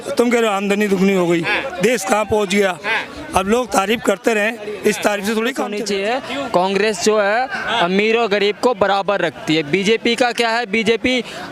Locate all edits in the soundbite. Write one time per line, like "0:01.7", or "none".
0:05.8